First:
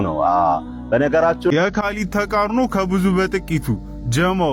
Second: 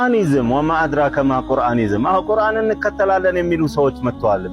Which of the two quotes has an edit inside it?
first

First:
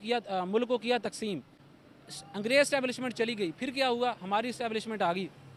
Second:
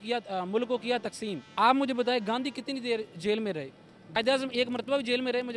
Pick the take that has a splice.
second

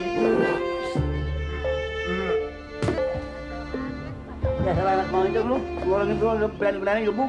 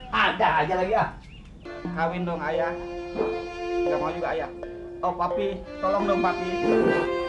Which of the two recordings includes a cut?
second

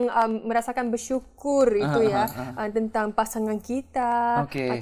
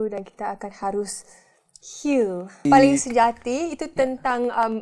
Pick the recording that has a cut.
second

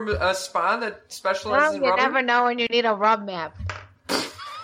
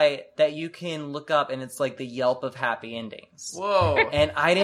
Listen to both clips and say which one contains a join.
first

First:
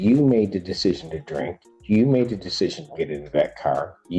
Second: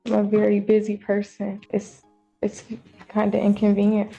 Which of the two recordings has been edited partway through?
second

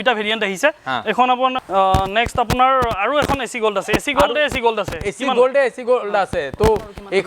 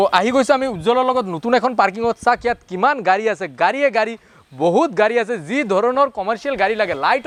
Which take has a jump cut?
first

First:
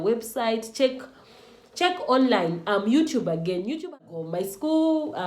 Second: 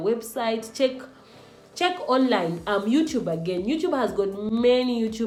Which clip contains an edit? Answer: first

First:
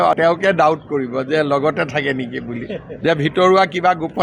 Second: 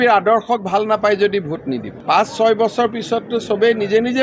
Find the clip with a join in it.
second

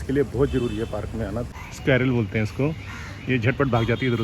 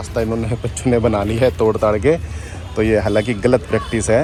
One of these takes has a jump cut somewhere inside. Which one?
first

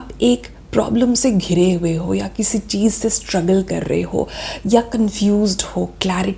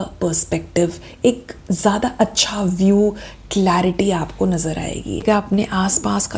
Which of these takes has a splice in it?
second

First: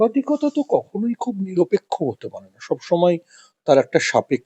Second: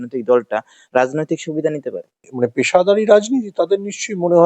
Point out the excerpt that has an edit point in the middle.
second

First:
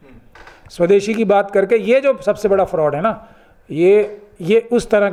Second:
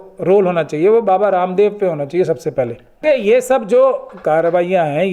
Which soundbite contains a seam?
second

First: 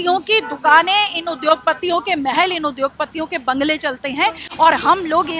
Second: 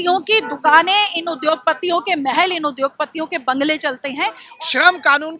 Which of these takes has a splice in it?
second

